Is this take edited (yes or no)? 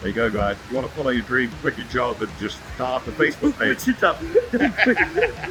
no